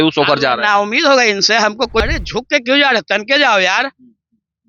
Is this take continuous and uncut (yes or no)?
no